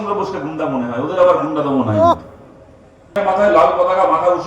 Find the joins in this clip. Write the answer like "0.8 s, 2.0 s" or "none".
3.2 s

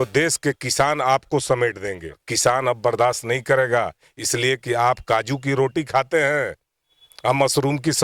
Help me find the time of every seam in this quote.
2.3 s

